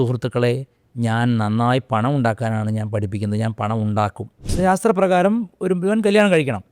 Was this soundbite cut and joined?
yes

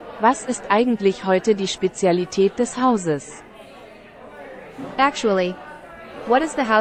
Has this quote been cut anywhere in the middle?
no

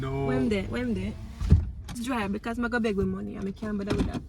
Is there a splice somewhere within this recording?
yes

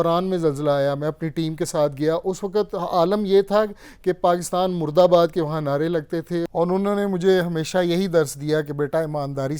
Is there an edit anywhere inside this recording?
yes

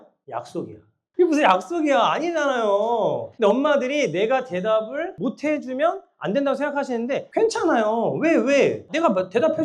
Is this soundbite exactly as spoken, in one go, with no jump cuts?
yes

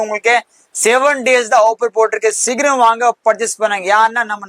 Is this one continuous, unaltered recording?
yes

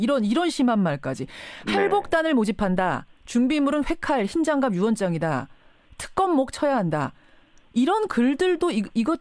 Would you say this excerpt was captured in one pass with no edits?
yes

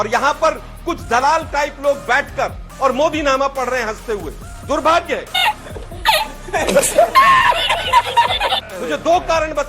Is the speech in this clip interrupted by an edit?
no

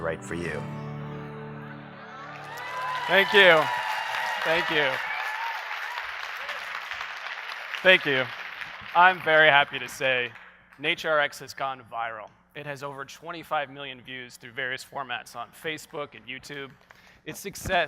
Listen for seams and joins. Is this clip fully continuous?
no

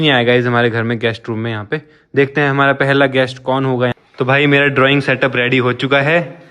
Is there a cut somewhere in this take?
yes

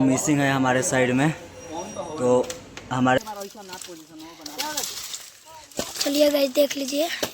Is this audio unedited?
no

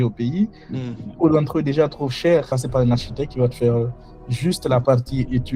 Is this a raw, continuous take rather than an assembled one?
no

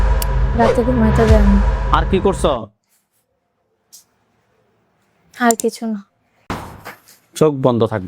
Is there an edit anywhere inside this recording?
yes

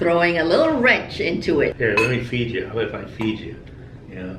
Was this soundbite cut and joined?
yes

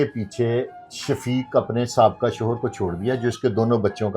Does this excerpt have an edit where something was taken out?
no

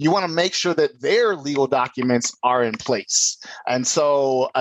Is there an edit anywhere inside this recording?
no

